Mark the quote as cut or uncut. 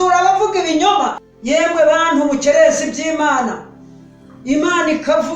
cut